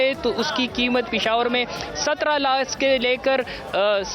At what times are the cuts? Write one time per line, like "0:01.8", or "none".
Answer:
none